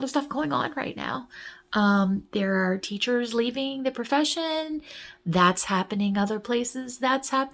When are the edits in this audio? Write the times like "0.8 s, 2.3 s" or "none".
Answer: none